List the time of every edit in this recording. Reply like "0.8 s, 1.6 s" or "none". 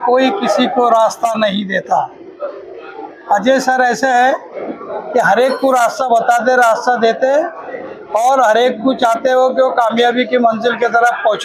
none